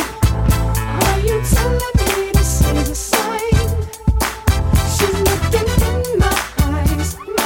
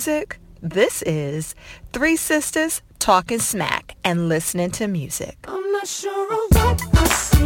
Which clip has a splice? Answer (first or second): second